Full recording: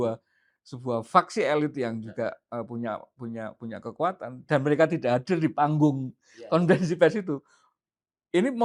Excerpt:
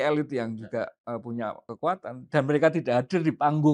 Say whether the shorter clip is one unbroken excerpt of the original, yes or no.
no